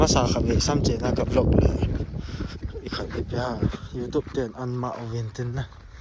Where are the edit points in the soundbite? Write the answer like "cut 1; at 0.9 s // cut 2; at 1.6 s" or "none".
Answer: none